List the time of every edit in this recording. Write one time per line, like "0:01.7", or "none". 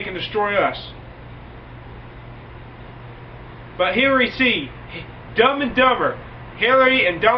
none